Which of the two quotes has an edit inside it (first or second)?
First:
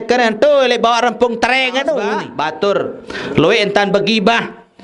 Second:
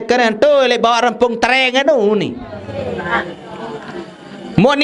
first